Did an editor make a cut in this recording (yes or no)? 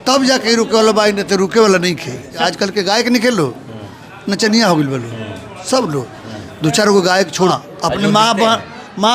yes